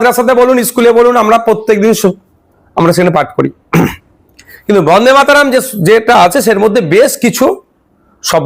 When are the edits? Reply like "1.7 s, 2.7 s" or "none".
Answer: none